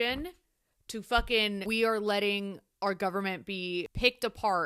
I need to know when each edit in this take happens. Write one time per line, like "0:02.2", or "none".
0:01.6

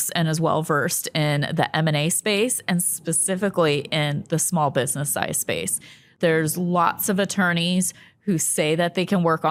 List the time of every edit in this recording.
none

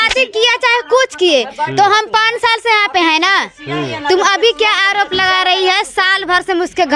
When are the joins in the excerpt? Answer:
none

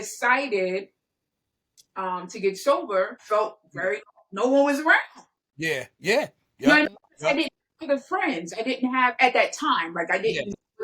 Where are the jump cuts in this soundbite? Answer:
0:03.2

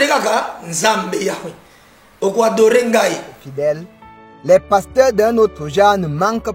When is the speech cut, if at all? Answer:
0:03.4

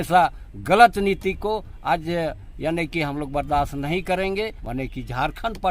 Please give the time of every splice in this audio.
0:04.6

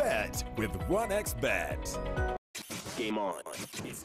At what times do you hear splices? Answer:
0:02.3

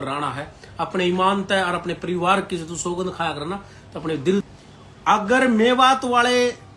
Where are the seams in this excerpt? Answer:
0:04.5

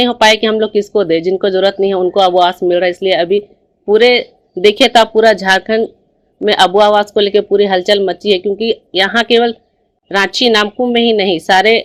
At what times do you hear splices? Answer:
none

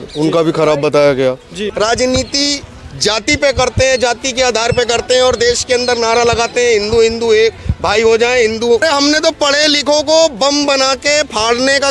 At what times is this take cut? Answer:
0:01.7
0:08.8

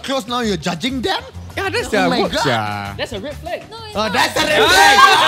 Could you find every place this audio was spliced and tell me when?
none

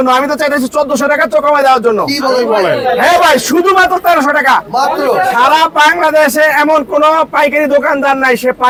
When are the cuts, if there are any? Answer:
none

